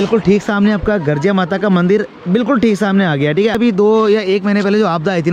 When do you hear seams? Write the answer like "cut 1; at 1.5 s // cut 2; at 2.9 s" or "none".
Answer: cut 1; at 3.6 s